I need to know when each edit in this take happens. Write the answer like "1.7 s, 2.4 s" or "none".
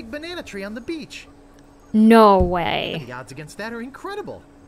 none